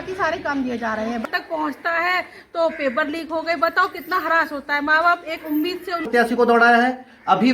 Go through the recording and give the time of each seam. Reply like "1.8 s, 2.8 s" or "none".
1.2 s, 6.0 s